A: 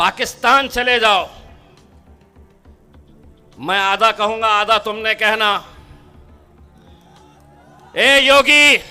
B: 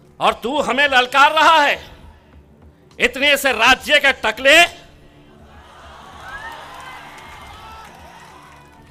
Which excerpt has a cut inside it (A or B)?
A